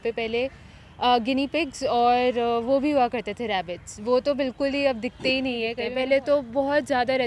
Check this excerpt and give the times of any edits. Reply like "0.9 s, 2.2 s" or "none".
5.8 s

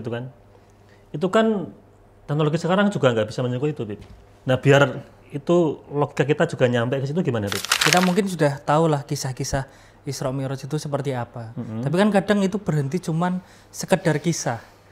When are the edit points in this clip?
7.8 s

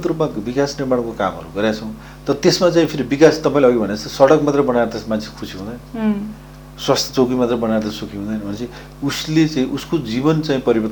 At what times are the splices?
none

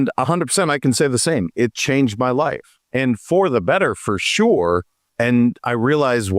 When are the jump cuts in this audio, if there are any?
5.0 s

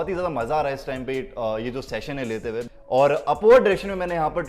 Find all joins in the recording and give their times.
2.7 s

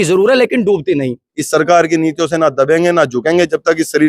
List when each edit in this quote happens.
1.3 s

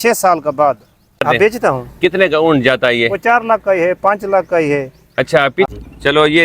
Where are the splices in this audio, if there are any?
1.2 s, 5.7 s

